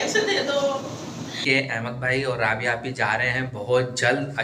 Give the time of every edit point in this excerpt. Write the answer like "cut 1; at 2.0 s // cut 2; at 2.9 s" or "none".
cut 1; at 1.4 s